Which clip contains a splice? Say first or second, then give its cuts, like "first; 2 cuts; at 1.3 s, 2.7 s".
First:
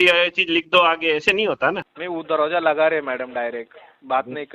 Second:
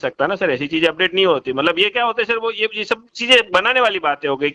first; 1 cut; at 1.9 s